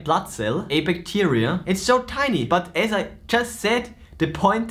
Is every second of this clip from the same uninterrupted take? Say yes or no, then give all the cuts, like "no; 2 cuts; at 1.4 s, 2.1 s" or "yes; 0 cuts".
no; 1 cut; at 2.5 s